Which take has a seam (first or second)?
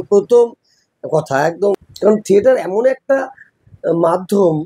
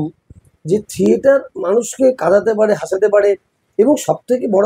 first